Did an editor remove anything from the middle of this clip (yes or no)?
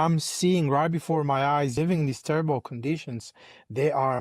yes